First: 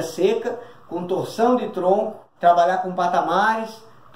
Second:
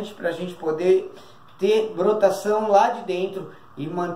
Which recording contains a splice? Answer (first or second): first